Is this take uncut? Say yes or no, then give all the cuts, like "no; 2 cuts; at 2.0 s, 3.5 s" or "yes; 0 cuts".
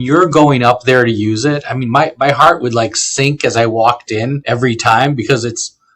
no; 1 cut; at 4.4 s